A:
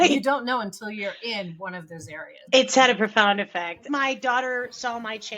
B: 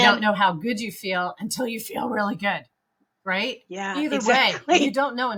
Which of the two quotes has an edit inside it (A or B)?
A